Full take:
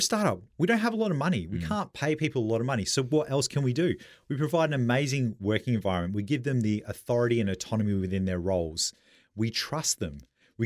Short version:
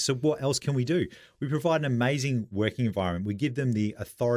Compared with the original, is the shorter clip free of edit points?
yes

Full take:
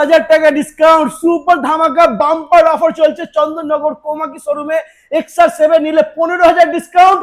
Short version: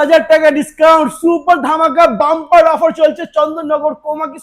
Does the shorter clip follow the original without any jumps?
yes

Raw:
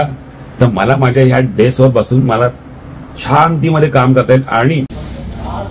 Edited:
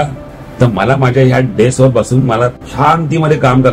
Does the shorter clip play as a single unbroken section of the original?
no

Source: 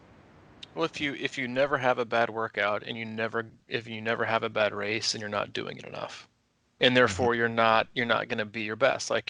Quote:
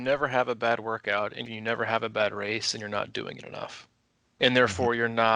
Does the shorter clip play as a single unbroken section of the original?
no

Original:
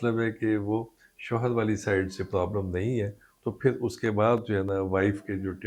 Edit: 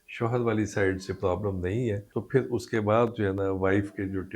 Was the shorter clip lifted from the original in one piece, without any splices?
no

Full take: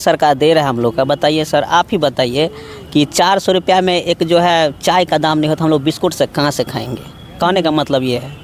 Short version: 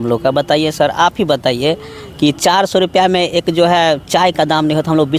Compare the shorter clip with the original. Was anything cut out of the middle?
no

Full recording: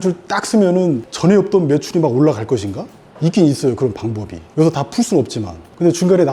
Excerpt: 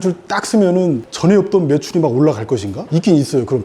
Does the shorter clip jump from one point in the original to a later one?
yes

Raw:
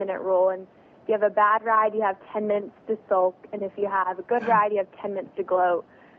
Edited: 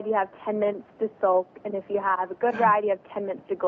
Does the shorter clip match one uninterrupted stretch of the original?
yes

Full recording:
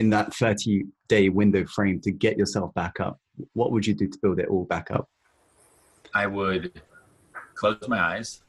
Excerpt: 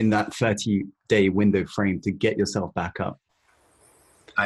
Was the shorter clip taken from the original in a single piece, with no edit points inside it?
no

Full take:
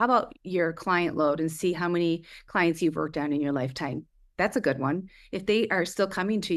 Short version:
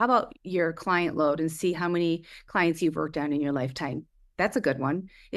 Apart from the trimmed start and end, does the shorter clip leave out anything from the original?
no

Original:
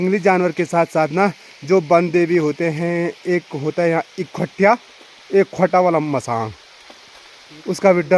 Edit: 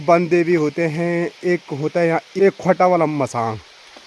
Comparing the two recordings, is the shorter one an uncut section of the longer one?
no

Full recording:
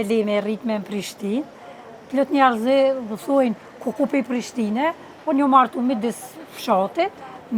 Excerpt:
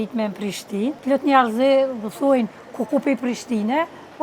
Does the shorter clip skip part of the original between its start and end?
yes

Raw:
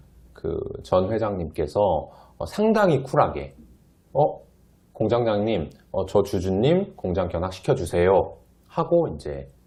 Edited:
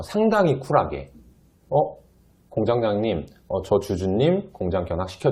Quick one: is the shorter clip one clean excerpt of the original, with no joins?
yes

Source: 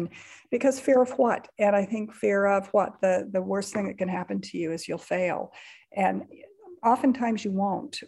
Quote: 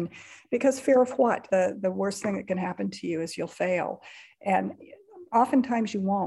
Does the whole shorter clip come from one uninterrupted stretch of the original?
no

